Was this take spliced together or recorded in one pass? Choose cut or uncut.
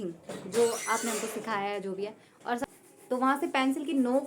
cut